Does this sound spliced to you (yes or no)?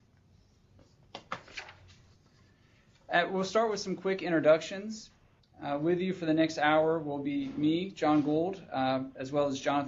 no